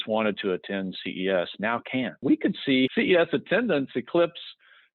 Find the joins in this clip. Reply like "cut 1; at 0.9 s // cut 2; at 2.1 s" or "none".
cut 1; at 2.2 s // cut 2; at 2.9 s